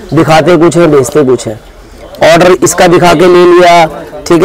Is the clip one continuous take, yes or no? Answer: yes